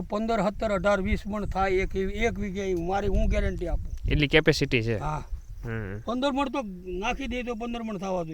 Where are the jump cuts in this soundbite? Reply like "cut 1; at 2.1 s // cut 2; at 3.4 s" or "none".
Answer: none

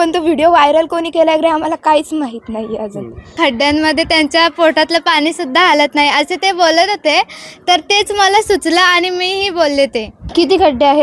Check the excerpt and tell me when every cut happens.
cut 1; at 3.3 s // cut 2; at 10.2 s

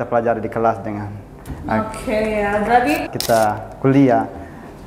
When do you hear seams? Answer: cut 1; at 3.2 s

